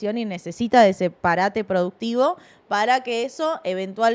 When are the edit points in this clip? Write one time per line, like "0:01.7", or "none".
none